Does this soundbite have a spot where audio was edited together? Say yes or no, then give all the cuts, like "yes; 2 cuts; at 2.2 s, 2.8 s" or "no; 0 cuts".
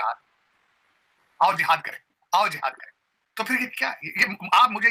no; 0 cuts